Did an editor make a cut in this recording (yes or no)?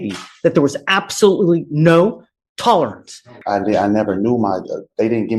yes